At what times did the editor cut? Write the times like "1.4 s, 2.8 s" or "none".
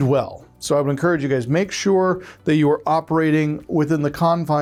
none